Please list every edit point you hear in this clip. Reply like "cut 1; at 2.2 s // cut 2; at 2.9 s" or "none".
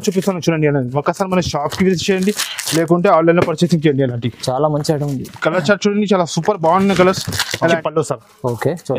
cut 1; at 7.8 s